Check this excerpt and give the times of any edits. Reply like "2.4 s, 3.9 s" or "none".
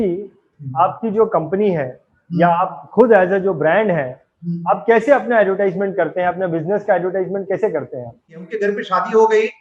8.4 s